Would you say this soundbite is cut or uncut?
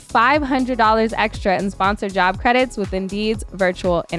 uncut